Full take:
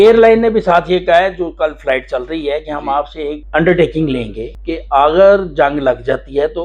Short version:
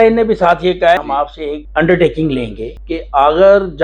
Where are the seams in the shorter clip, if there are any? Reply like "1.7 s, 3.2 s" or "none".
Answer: 1.0 s